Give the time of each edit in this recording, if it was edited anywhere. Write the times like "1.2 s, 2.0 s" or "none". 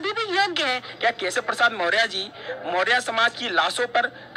1.2 s